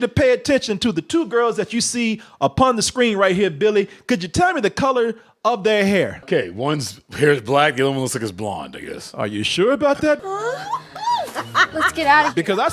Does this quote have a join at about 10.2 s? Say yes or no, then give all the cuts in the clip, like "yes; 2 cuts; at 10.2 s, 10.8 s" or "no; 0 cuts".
yes; 2 cuts; at 6.2 s, 10.2 s